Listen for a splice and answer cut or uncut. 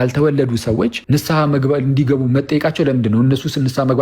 cut